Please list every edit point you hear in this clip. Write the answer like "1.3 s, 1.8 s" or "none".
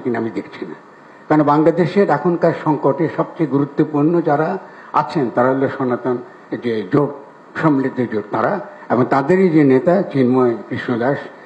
none